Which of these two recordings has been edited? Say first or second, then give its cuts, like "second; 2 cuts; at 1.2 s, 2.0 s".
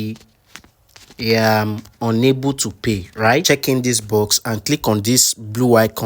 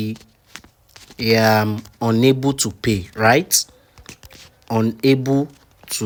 first; 1 cut; at 3.4 s